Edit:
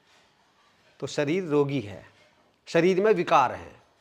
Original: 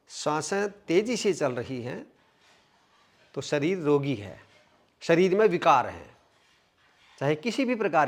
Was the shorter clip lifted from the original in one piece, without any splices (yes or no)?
yes